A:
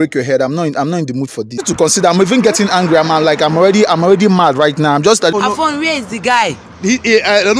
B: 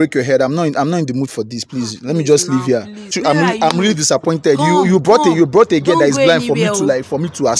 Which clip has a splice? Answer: A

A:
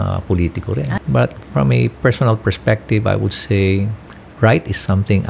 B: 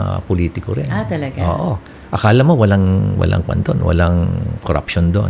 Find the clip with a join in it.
A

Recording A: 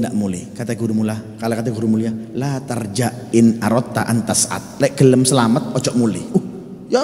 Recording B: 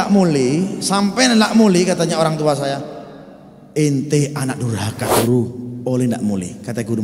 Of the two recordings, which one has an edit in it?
B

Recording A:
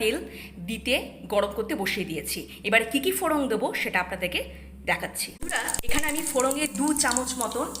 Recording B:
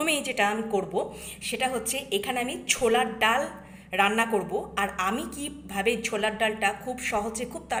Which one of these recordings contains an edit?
A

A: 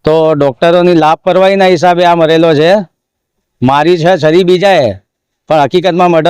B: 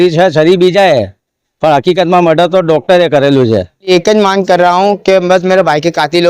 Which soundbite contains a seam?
B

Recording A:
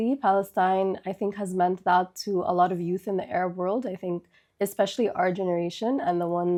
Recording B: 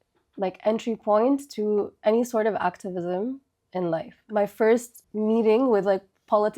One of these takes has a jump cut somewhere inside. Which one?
B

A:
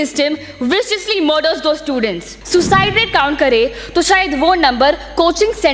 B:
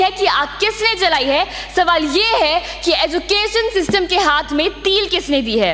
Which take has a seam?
A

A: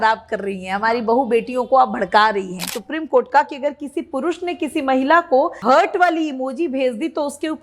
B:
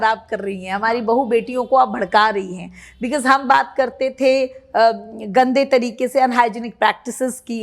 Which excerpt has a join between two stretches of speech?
A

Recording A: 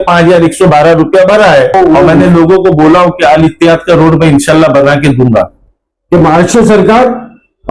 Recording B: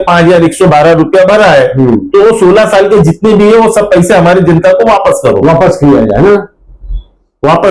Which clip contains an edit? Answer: A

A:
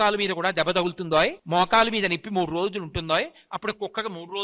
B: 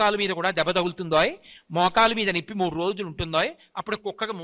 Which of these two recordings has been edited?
A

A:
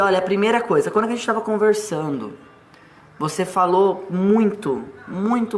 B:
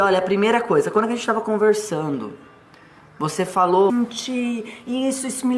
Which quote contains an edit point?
A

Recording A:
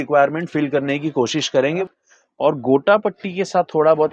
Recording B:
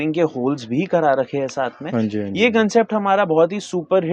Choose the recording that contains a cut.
A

